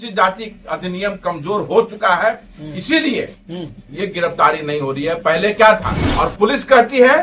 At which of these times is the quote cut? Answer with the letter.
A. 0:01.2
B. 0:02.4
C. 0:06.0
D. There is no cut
C